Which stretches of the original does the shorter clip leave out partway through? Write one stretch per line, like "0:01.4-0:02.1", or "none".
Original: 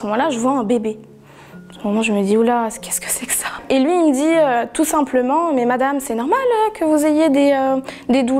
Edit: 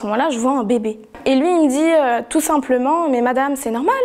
0:01.0-0:03.5